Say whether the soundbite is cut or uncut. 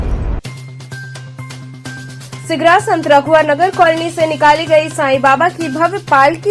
uncut